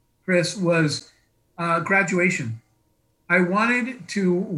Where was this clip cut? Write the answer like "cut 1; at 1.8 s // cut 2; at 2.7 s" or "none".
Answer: none